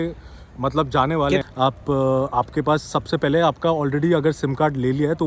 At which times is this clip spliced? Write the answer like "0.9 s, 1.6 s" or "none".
1.4 s